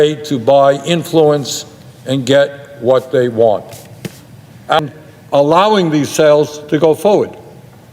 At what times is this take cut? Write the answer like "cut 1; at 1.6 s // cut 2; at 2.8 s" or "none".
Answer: cut 1; at 4.8 s